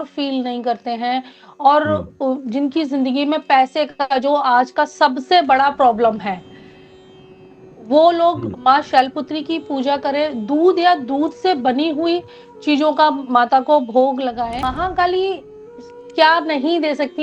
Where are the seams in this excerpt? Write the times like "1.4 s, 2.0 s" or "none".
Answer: 14.7 s